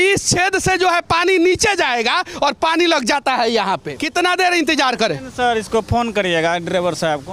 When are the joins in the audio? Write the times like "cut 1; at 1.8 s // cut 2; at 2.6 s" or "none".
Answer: cut 1; at 4.0 s